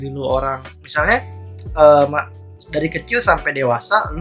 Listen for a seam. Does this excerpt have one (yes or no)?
no